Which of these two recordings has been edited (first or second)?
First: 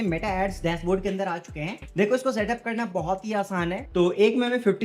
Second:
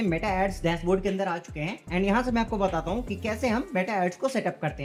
first